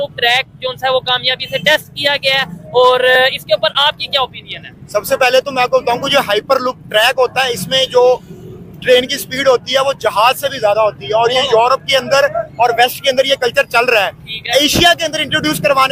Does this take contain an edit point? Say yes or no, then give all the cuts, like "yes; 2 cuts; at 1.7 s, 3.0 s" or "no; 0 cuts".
no; 0 cuts